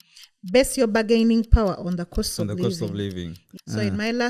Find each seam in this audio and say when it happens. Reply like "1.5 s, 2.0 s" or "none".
3.4 s